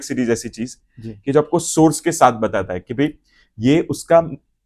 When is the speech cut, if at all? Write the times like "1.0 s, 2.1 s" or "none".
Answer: none